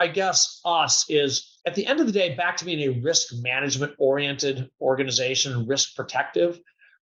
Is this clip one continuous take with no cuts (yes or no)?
no